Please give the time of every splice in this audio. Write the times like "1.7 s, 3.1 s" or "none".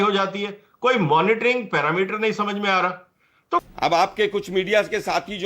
3.6 s